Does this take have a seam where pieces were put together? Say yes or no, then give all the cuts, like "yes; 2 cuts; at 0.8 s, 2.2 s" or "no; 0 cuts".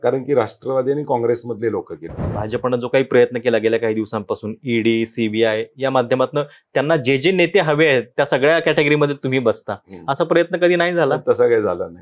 yes; 1 cut; at 2.4 s